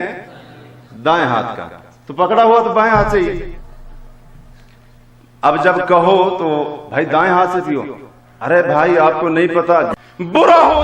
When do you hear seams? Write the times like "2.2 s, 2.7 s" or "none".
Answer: 9.9 s